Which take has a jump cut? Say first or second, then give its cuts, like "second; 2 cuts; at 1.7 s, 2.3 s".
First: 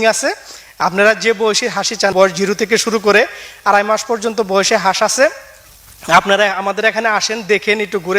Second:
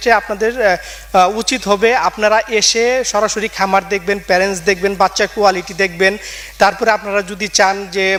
first; 1 cut; at 2.1 s